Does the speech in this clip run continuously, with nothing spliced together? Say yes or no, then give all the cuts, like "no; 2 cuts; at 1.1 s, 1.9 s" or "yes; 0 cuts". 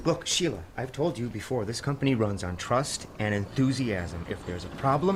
yes; 0 cuts